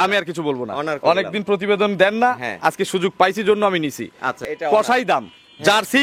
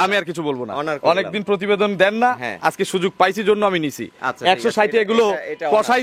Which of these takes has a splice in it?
first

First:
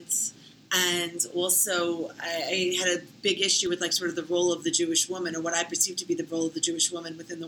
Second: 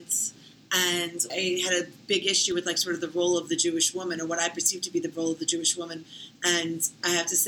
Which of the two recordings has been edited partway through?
second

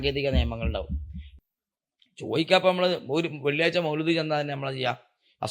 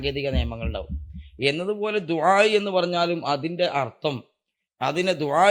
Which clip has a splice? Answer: first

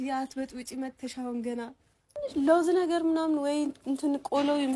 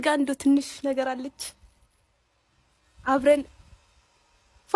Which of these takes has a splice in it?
first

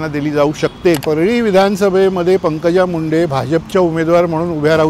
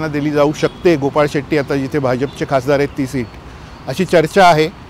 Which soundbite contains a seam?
first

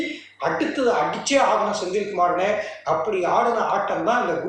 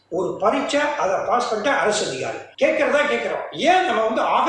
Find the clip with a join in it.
second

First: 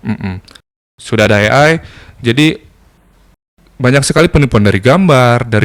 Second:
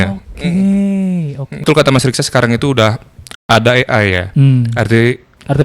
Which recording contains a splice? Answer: second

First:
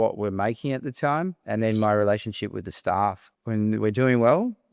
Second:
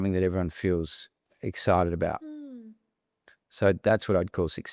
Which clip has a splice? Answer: first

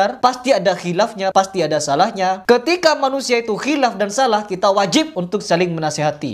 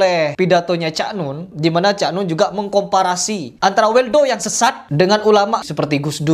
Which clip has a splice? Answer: second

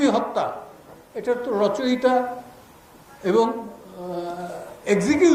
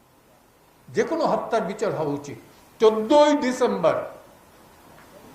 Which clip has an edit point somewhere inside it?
second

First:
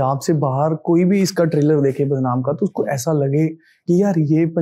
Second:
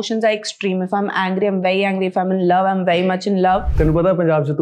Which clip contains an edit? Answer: second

